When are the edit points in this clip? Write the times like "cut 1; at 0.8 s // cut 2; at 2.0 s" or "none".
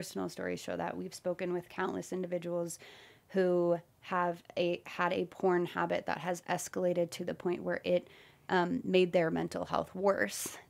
none